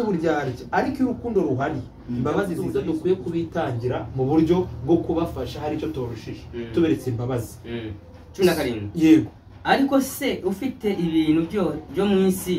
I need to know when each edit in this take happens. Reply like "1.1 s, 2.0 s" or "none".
2.6 s